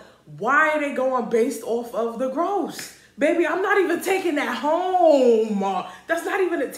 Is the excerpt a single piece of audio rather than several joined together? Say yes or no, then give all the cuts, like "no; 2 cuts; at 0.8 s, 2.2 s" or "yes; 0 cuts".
yes; 0 cuts